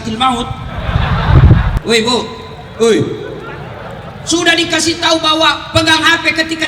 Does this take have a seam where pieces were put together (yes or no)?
yes